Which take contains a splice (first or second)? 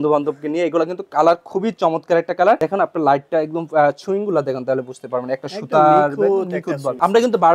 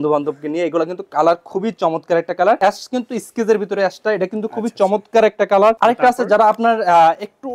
second